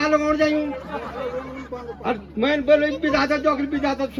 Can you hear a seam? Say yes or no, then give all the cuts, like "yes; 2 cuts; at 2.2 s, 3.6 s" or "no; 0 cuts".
no; 0 cuts